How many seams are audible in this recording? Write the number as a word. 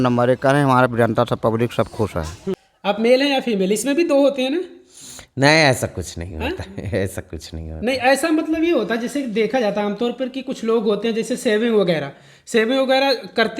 one